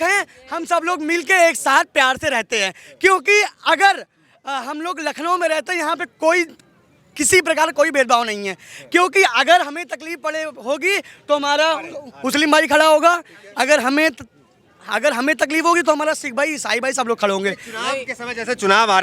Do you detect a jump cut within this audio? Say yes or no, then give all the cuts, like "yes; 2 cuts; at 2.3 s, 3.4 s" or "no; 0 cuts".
no; 0 cuts